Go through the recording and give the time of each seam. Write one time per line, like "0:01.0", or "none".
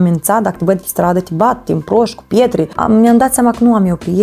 0:02.7

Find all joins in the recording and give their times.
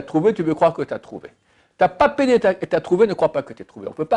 none

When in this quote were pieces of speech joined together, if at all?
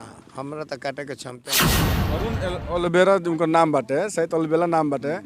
0:01.5
0:02.2

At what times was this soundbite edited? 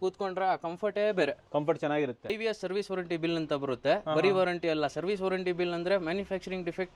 0:02.4

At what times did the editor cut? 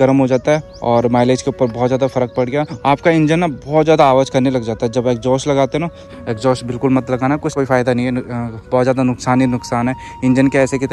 0:02.7
0:06.1
0:07.5

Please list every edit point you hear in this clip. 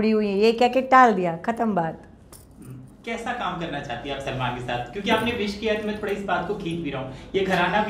none

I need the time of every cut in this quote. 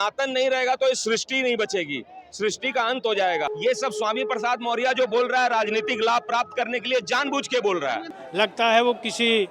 0:03.5
0:08.2

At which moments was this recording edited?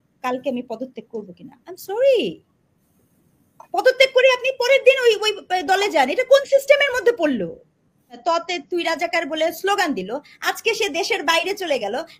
0:08.2

